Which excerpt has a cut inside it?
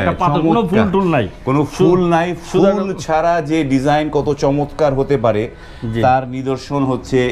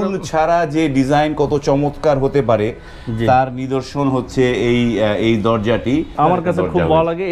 second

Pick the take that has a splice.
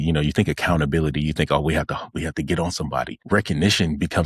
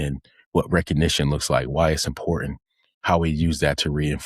first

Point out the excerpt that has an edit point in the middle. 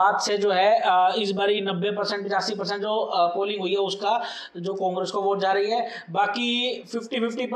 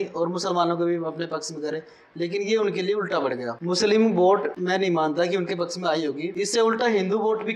second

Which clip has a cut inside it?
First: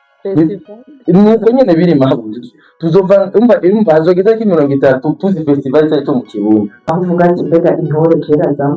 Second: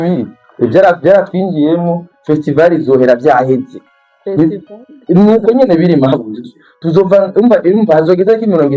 first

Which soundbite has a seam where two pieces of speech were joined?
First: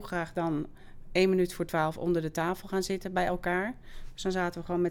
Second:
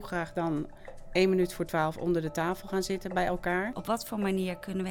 second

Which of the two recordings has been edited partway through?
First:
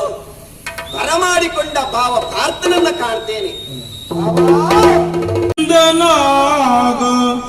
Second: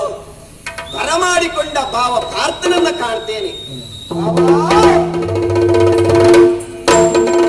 first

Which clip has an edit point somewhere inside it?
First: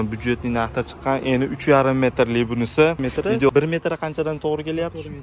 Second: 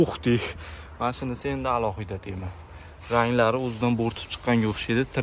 first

